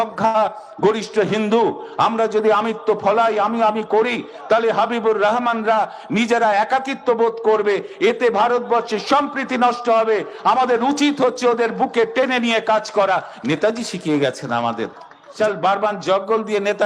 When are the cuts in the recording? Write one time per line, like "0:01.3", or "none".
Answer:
0:15.3